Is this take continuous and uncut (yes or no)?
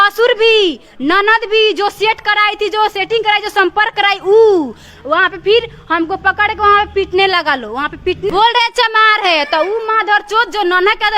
no